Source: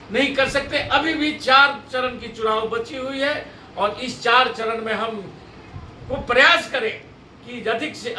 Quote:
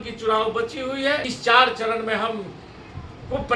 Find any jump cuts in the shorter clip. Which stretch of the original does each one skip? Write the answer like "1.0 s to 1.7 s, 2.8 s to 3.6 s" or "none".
3.5 s to 4.1 s